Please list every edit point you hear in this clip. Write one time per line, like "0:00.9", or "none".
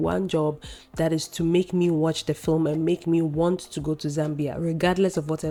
none